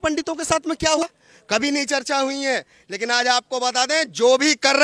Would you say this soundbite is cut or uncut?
cut